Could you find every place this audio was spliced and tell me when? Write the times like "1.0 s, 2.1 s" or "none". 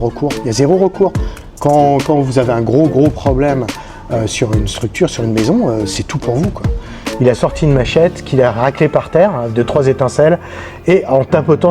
7.0 s